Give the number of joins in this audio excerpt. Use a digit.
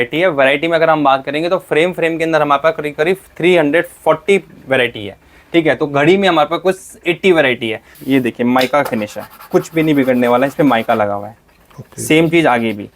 1